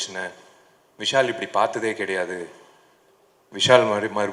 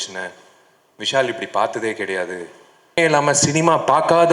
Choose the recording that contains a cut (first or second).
second